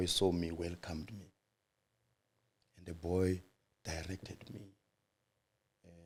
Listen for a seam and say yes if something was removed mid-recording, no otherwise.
no